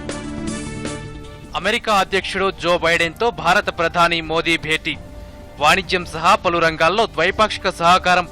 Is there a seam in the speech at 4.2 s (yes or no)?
no